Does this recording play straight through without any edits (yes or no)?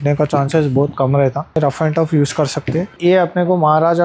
no